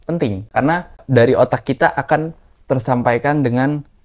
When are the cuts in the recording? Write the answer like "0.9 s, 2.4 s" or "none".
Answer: 1.0 s